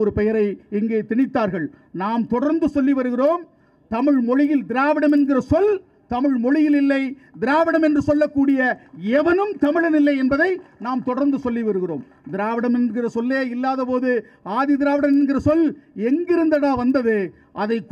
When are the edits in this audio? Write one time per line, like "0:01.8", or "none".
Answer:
none